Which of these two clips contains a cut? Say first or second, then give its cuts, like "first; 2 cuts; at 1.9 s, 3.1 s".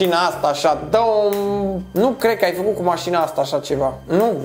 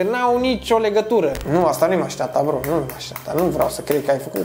second; 1 cut; at 1.4 s